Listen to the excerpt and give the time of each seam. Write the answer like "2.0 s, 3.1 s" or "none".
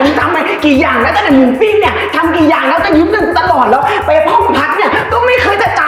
none